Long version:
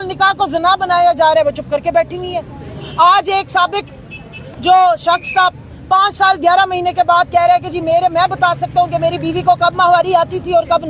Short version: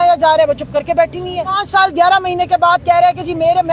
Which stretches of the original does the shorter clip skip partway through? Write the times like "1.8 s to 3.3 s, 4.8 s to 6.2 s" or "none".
2.6 s to 6.0 s